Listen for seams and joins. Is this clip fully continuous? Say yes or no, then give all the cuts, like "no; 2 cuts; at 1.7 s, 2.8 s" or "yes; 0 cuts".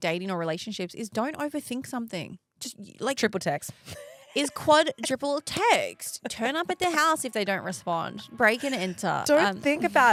yes; 0 cuts